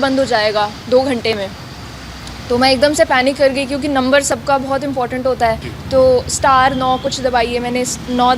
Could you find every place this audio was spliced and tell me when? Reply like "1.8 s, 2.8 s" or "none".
5.7 s